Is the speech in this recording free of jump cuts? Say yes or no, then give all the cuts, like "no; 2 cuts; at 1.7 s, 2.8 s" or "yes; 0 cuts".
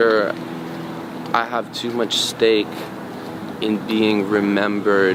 yes; 0 cuts